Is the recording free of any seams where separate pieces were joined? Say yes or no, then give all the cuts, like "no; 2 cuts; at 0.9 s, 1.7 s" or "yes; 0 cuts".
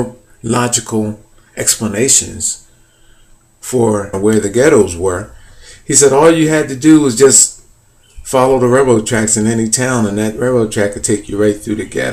yes; 0 cuts